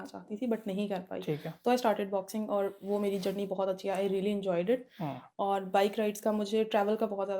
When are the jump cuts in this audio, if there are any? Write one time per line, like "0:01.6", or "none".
none